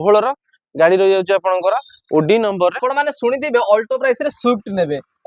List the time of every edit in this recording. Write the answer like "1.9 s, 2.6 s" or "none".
2.8 s